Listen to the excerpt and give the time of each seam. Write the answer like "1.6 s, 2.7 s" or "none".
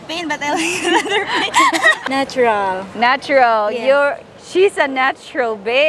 2.0 s